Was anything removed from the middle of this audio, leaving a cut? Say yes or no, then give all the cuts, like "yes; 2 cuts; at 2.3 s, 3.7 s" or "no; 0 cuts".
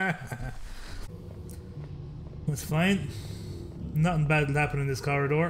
yes; 1 cut; at 1.1 s